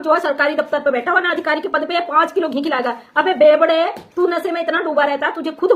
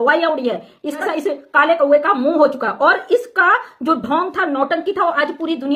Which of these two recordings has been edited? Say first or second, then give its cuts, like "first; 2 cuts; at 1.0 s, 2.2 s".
second; 1 cut; at 1.0 s